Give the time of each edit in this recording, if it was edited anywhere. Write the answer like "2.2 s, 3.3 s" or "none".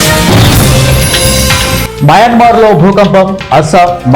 1.8 s